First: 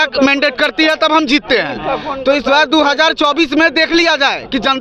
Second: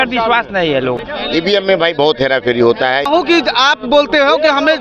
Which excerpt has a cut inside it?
second; 2 cuts; at 1.0 s, 3.0 s

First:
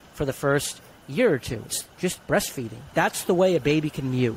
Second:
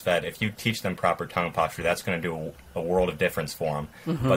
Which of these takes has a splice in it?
first; 2 cuts; at 1.8 s, 2.9 s

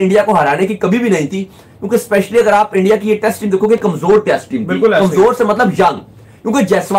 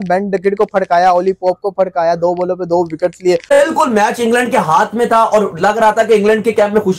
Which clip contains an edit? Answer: second; 1 cut; at 3.5 s

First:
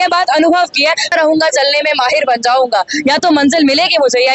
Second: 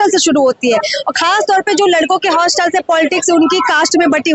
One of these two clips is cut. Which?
first; 1 cut; at 1.1 s

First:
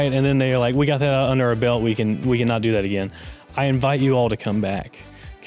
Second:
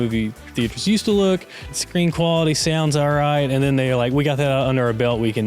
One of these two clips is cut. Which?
second; 1 cut; at 1.6 s

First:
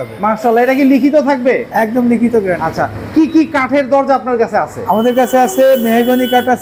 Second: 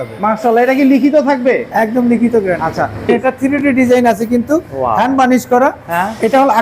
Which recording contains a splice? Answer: second; 1 cut; at 3.1 s

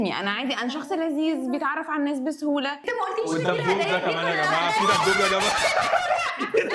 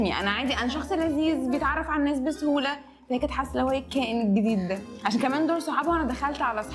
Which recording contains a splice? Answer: first; 1 cut; at 2.8 s

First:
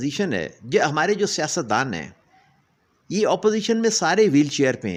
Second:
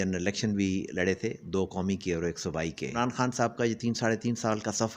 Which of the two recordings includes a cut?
second; 1 cut; at 3.0 s

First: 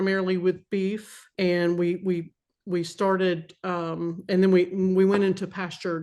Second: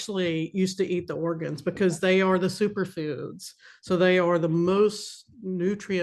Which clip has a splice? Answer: first; 1 cut; at 1.3 s

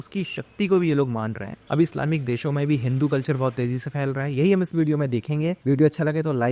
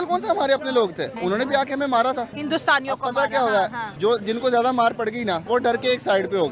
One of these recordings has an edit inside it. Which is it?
second; 4 cuts; at 1.1 s, 2.4 s, 3.8 s, 5.4 s

